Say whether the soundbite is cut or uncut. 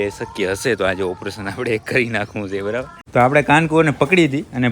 cut